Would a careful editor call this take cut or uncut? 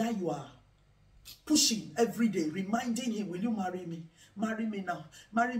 uncut